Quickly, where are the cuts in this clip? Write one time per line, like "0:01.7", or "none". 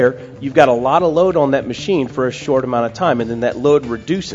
none